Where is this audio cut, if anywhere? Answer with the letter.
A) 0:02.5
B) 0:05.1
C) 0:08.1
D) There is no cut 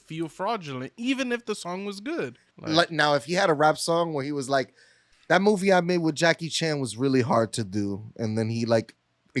A